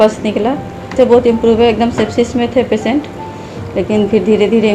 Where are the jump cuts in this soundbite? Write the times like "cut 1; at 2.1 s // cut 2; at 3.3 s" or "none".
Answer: cut 1; at 0.9 s